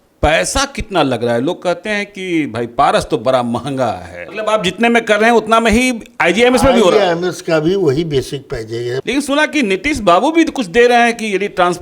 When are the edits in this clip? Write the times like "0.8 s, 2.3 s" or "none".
4.2 s, 9.0 s